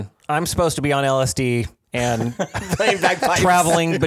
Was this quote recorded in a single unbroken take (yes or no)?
yes